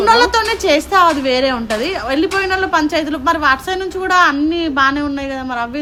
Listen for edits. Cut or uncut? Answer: uncut